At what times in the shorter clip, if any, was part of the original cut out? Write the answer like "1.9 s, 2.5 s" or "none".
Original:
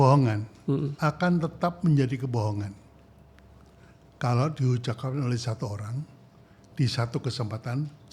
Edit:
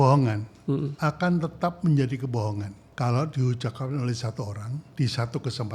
2.8 s, 4.8 s